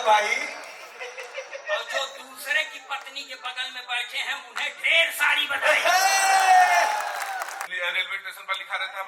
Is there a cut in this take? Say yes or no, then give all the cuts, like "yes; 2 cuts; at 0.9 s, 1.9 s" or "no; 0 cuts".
yes; 1 cut; at 7.7 s